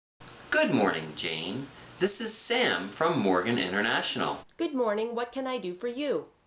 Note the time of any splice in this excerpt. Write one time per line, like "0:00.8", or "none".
0:04.5